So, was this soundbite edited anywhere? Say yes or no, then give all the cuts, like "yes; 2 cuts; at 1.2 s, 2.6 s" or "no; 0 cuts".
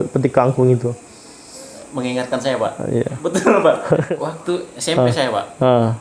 yes; 1 cut; at 4.0 s